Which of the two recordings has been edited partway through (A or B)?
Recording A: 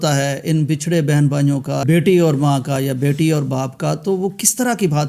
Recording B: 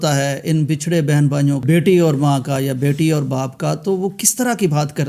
B